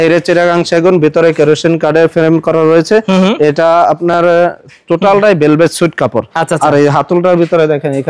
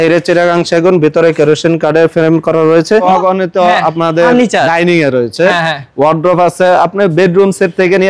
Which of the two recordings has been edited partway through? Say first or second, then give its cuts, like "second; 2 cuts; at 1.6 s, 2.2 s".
second; 1 cut; at 3.0 s